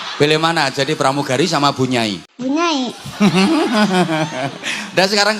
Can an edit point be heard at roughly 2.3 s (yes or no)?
yes